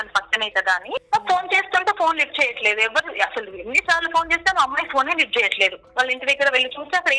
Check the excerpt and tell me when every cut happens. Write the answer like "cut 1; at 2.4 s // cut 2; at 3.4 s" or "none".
cut 1; at 1.1 s // cut 2; at 5.8 s